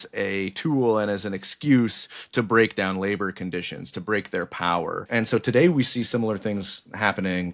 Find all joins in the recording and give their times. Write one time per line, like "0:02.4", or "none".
0:05.1